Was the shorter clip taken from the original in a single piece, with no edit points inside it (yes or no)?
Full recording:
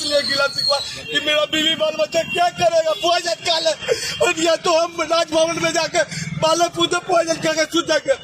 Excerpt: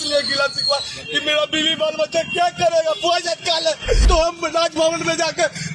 no